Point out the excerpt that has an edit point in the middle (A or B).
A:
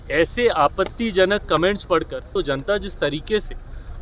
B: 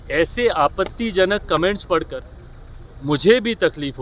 A